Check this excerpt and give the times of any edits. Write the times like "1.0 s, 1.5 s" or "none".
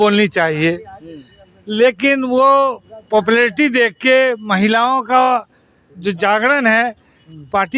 none

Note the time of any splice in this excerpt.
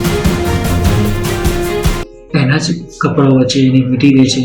2.1 s

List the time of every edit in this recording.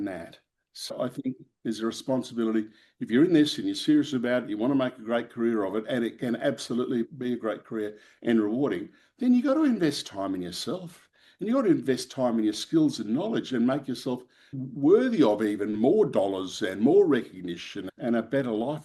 0.9 s, 17.8 s

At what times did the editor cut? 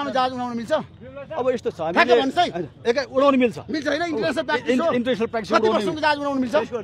none

